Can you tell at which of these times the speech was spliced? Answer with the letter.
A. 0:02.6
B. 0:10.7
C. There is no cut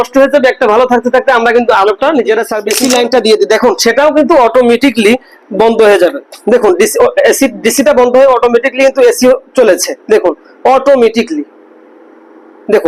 A